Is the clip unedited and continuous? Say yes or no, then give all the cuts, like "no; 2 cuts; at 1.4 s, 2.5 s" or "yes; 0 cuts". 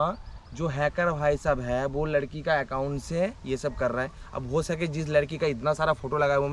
yes; 0 cuts